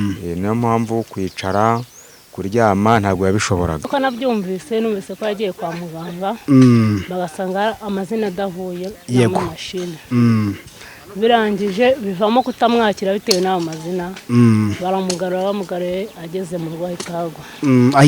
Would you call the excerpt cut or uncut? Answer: cut